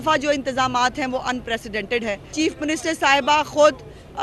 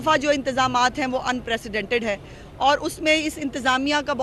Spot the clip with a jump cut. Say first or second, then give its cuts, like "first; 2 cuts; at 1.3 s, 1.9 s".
first; 1 cut; at 2.3 s